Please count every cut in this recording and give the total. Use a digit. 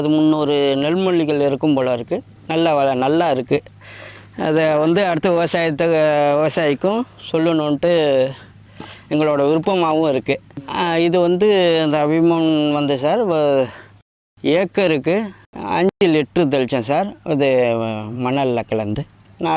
0